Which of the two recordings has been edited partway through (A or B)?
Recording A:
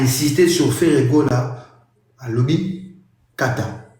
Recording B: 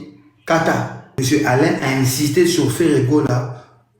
B